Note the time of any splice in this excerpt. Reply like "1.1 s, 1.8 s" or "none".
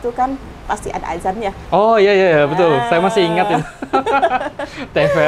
none